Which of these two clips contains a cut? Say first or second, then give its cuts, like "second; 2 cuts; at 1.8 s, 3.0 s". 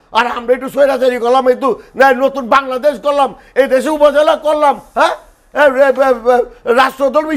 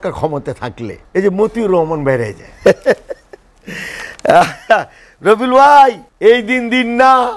second; 3 cuts; at 0.9 s, 2.4 s, 6.1 s